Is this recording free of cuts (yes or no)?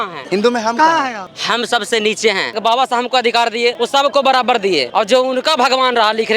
no